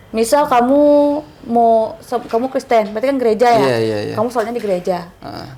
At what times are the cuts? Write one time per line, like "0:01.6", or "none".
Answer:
none